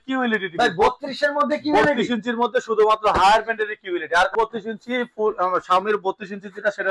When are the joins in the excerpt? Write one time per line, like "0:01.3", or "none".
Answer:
0:04.3